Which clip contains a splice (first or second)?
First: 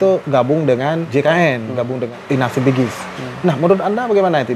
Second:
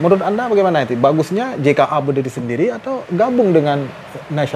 first